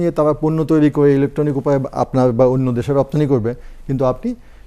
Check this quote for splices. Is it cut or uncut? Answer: uncut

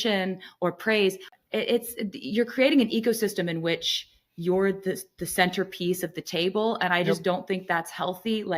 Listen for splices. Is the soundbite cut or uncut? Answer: uncut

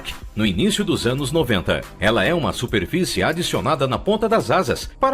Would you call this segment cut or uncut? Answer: uncut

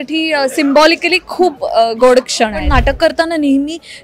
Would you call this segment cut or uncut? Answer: cut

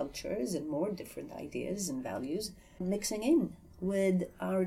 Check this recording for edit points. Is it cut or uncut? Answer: cut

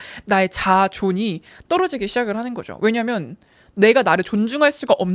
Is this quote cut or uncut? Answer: uncut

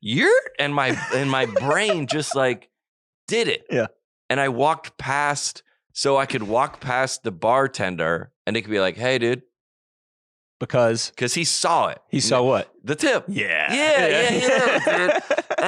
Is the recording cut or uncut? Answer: uncut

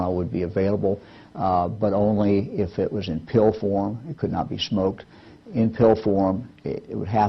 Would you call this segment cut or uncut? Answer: cut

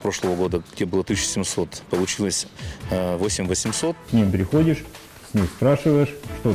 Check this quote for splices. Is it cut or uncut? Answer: cut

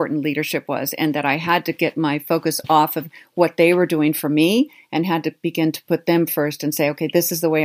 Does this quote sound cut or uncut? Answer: uncut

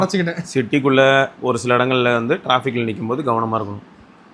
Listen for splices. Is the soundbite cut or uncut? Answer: uncut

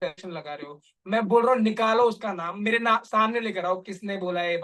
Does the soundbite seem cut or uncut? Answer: uncut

